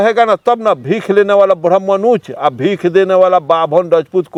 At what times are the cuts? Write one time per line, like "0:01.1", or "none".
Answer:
none